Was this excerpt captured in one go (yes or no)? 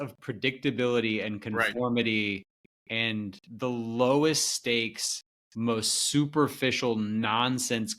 no